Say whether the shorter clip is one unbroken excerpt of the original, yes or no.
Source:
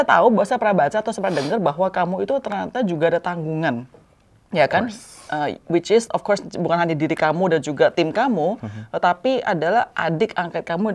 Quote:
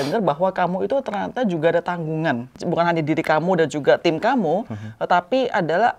no